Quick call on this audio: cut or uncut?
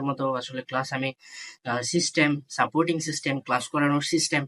uncut